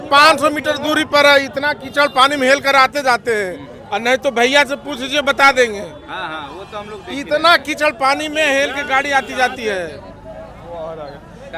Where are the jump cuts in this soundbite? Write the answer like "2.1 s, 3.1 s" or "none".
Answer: none